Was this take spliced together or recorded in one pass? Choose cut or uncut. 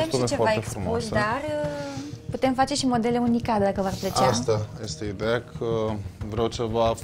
uncut